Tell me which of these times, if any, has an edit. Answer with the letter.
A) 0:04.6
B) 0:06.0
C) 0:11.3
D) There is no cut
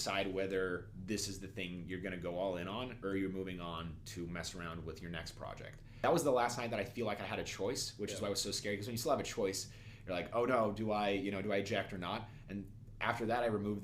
B